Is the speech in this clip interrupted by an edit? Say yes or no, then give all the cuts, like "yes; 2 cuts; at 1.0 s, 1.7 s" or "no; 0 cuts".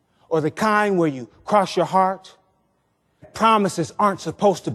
yes; 1 cut; at 3.3 s